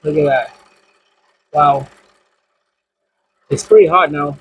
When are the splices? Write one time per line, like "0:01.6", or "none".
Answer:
none